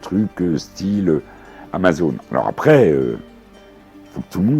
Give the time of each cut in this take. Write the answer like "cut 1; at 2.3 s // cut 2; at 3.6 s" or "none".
none